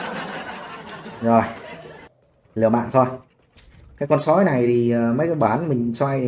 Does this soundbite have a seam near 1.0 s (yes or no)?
yes